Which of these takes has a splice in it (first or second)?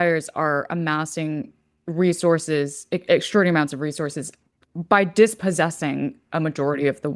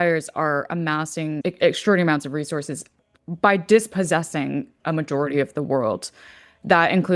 second